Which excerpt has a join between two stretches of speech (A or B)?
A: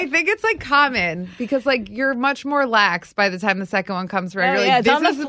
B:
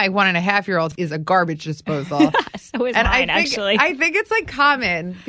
B